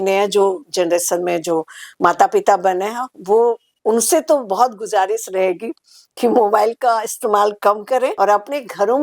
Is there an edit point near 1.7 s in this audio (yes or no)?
no